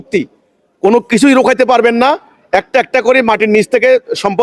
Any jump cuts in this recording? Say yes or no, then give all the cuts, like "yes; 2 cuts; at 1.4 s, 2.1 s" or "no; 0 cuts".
no; 0 cuts